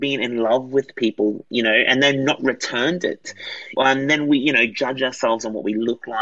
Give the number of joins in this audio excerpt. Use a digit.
1